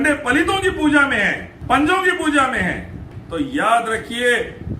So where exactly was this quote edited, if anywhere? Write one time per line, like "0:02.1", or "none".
0:01.5
0:03.1